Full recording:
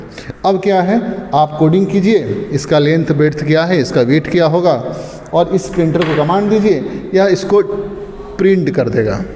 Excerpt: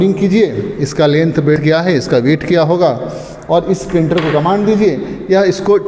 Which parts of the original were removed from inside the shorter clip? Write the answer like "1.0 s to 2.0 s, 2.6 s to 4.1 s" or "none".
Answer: 3.3 s to 3.4 s